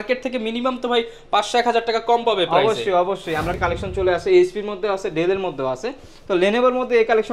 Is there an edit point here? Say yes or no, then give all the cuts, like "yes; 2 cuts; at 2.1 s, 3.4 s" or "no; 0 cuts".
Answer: yes; 1 cut; at 3.5 s